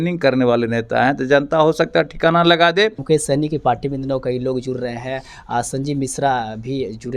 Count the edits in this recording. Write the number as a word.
one